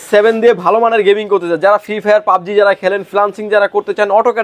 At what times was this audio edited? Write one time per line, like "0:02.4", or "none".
none